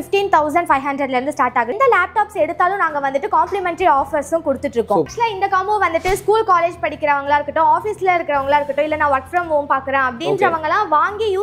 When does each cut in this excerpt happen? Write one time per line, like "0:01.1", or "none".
0:01.7
0:05.1